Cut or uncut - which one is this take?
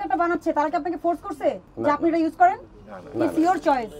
uncut